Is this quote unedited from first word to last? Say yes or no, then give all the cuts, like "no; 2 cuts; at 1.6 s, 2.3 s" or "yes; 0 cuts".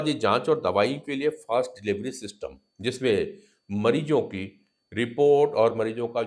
yes; 0 cuts